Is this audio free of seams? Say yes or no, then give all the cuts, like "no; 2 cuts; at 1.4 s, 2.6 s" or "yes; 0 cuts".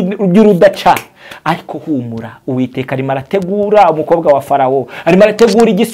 yes; 0 cuts